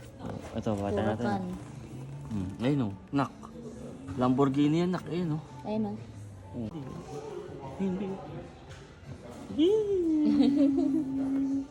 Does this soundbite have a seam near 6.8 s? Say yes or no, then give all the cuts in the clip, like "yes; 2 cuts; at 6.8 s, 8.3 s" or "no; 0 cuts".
yes; 1 cut; at 6.8 s